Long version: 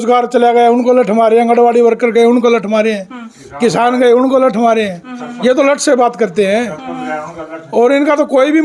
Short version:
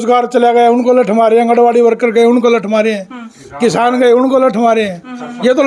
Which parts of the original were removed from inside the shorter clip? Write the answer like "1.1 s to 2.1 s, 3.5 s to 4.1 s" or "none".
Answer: none